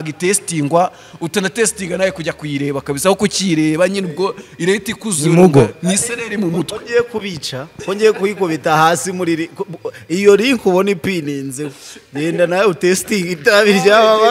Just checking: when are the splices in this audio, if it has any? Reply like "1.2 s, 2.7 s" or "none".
none